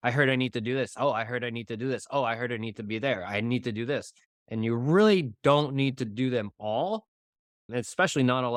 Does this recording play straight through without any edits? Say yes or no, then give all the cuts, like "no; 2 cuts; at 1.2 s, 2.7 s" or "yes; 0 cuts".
yes; 0 cuts